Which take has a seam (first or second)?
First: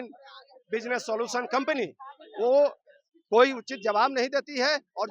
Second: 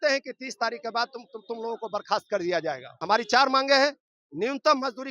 second